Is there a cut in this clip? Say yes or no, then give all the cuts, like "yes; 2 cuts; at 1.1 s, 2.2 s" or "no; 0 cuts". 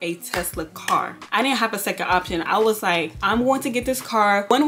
no; 0 cuts